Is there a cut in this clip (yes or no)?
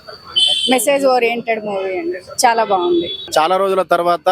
yes